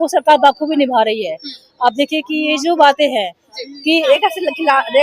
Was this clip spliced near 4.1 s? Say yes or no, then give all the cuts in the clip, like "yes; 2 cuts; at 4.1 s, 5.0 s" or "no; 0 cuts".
yes; 1 cut; at 4.1 s